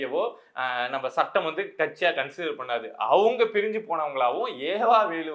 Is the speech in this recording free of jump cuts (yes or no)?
yes